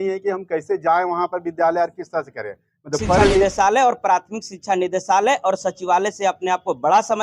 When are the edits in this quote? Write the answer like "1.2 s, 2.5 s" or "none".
3.4 s